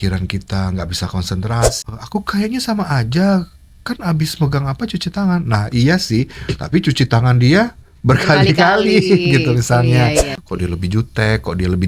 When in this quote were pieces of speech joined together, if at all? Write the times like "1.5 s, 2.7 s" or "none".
1.8 s, 10.3 s